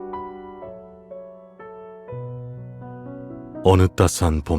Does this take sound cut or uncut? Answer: cut